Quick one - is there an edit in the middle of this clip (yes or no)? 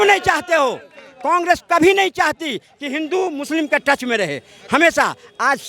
no